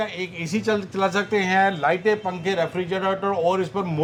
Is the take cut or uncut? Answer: uncut